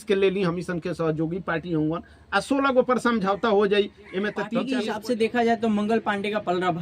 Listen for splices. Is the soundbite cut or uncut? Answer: cut